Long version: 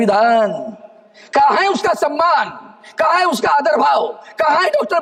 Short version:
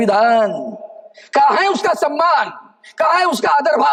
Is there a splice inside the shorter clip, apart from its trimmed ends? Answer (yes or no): no